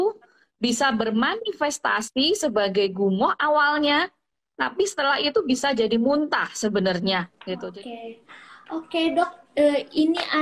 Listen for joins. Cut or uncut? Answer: cut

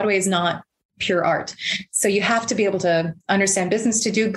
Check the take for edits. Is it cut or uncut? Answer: uncut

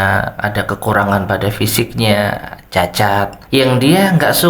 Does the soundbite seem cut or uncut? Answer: cut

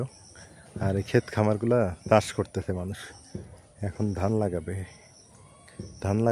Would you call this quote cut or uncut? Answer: uncut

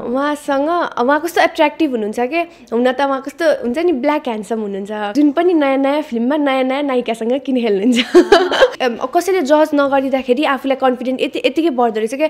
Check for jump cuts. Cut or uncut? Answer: cut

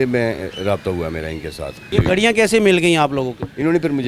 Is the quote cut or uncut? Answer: cut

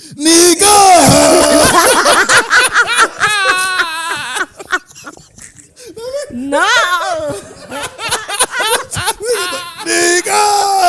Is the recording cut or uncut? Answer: uncut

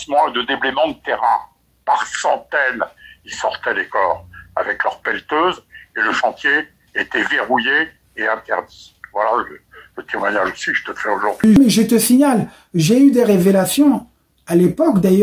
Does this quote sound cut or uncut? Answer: cut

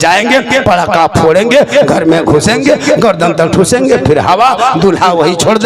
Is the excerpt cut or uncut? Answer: uncut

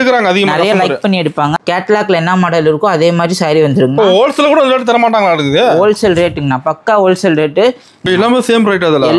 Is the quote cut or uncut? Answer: cut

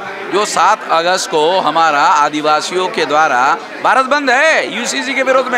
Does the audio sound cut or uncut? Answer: uncut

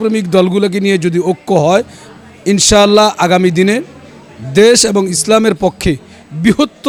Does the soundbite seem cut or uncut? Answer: uncut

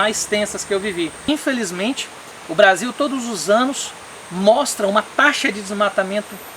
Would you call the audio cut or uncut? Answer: cut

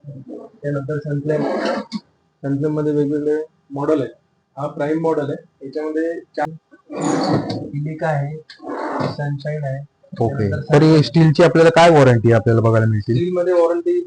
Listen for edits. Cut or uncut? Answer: cut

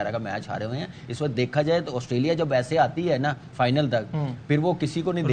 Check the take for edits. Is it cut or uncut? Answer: uncut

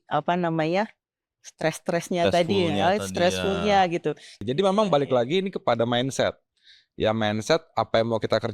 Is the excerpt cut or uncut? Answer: cut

